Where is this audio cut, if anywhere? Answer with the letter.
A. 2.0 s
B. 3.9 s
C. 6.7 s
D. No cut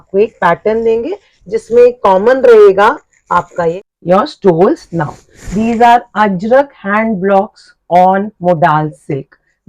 B